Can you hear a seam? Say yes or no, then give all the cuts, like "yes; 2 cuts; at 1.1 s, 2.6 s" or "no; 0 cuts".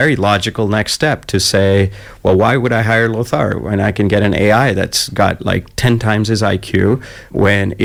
no; 0 cuts